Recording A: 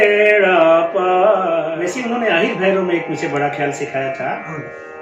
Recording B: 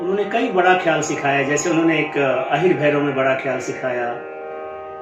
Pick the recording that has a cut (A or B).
A